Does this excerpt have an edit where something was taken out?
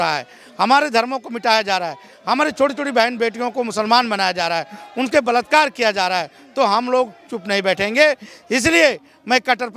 no; 0 cuts

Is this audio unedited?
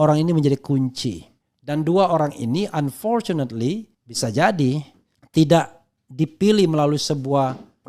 yes; 0 cuts

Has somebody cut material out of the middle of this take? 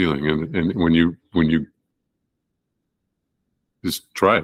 no; 0 cuts

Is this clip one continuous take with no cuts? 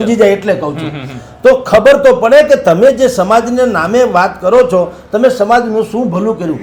yes; 0 cuts

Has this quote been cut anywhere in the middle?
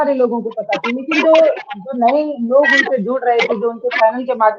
no; 0 cuts

